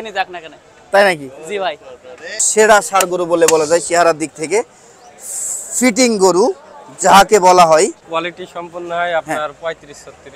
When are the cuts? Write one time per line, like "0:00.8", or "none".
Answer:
0:02.4
0:08.0